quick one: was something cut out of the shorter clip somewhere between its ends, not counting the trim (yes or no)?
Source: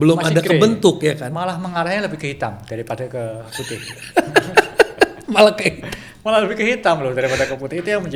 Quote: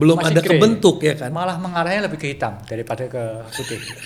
no